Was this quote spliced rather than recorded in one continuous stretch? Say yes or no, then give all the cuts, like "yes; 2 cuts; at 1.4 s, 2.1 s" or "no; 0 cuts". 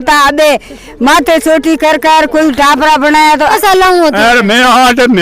yes; 1 cut; at 3.5 s